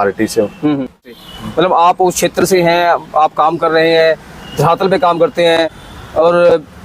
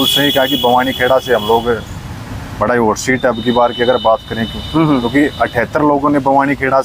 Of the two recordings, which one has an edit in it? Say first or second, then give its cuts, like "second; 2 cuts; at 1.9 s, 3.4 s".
first; 1 cut; at 1.1 s